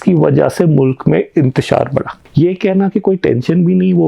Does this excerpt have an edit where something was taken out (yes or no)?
yes